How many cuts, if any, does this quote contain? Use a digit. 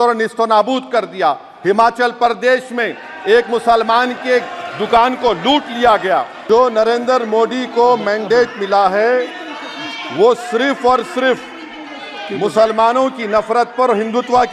1